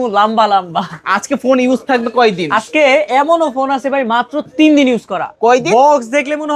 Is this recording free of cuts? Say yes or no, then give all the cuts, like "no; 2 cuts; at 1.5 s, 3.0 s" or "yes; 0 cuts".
yes; 0 cuts